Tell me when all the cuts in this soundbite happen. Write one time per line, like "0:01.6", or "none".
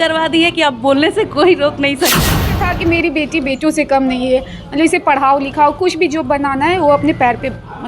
0:02.4